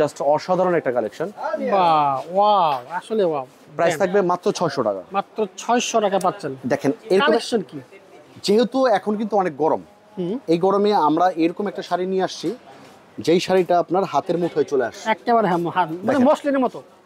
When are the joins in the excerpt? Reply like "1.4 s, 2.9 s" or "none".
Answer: none